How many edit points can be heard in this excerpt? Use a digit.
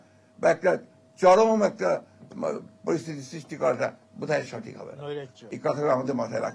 1